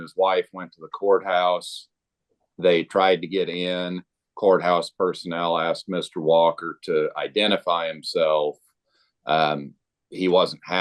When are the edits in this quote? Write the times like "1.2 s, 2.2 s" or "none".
4.3 s